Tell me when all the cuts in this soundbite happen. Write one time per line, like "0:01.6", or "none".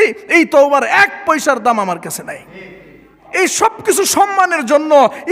0:03.2